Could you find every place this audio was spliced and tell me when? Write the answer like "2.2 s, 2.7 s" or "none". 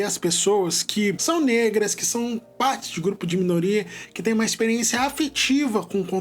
1.2 s